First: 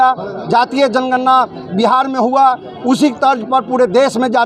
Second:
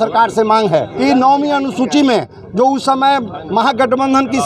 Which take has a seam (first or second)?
second